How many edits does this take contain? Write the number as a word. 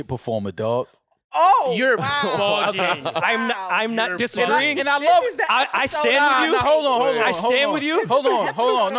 zero